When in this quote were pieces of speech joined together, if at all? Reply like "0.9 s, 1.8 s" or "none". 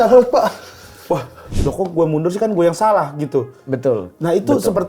1.5 s